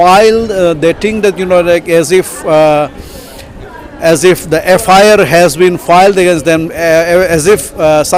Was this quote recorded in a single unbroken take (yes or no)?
yes